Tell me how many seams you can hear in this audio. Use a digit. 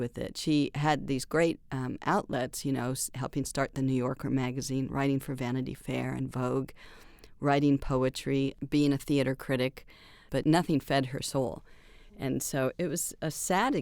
3